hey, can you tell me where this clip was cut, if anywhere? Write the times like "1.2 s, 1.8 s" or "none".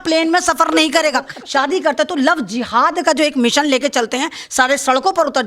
1.4 s

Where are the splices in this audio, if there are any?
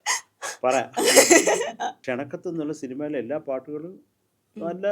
none

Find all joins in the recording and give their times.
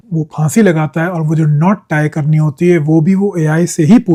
none

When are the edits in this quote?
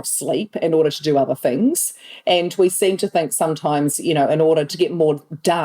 4.7 s

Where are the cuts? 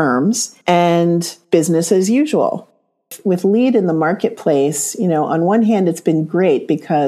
2.6 s

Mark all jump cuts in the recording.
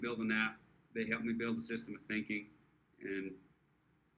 none

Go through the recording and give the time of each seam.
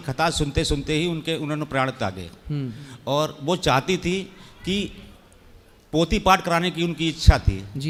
none

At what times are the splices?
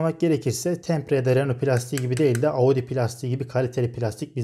none

